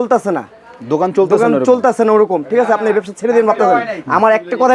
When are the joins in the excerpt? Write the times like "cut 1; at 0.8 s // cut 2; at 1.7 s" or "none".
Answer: none